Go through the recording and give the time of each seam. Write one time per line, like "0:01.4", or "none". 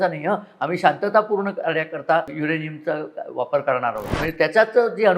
0:02.3
0:04.1